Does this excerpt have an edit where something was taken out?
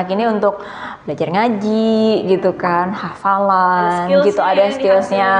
no; 0 cuts

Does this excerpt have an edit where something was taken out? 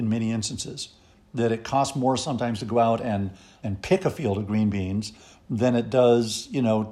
no; 0 cuts

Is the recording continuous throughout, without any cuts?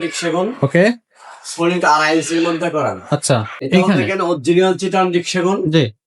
no; 1 cut; at 3.5 s

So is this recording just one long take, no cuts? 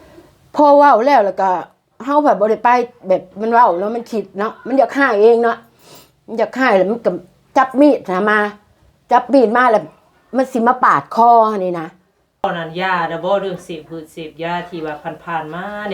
no; 1 cut; at 12.4 s

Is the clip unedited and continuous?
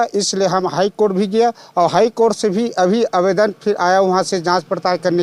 yes; 0 cuts

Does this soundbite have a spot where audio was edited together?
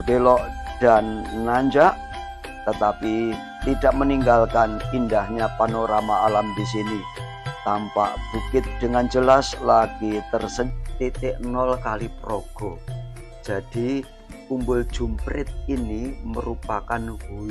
yes; 1 cut; at 10.7 s

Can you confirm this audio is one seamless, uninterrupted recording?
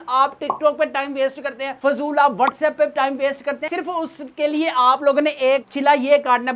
no; 1 cut; at 3.7 s

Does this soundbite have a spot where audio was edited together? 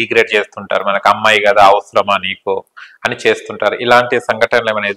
no; 0 cuts

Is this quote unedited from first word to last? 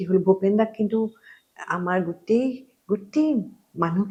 yes; 0 cuts

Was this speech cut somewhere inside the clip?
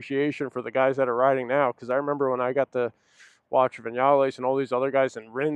no; 0 cuts

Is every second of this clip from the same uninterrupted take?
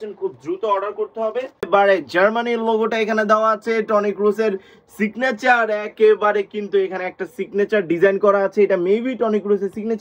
no; 1 cut; at 1.7 s

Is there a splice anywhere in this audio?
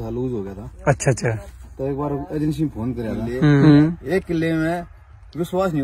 yes; 1 cut; at 3.6 s

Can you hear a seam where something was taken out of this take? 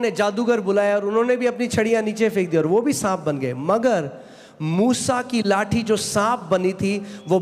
no; 0 cuts

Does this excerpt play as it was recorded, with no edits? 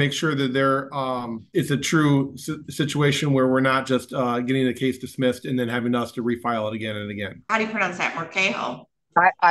no; 2 cuts; at 1.4 s, 7.4 s

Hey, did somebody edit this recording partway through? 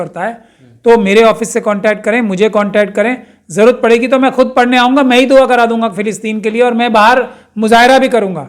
no; 0 cuts

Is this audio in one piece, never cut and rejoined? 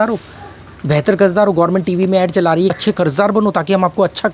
no; 1 cut; at 2.7 s

